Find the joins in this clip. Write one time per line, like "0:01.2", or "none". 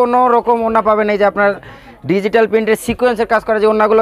none